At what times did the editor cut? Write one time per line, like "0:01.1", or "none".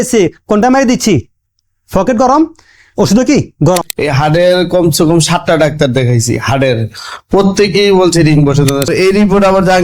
0:03.8
0:08.9

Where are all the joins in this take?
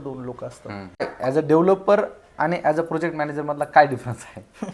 0:01.1

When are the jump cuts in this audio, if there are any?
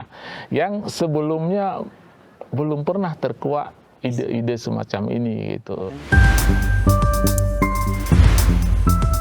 0:05.9

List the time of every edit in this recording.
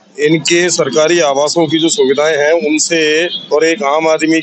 none

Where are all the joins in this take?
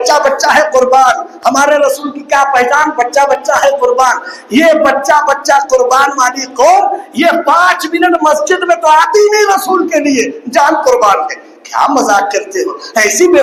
none

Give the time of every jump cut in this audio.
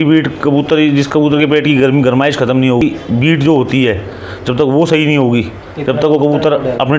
0:02.8

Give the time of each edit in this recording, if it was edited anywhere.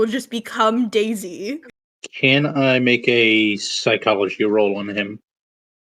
0:01.7

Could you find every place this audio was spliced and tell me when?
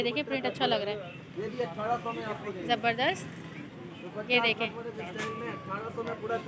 none

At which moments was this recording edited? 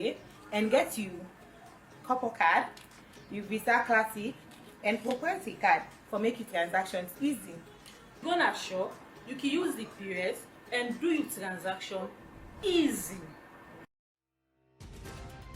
0:13.8

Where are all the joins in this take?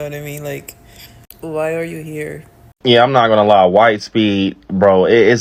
none

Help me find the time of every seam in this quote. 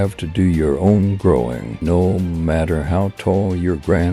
0:01.7

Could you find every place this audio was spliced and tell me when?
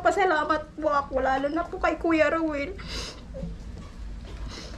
none

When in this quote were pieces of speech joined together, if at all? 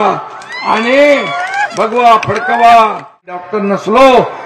0:03.5

